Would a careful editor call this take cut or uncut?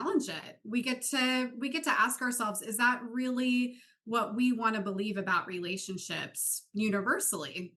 uncut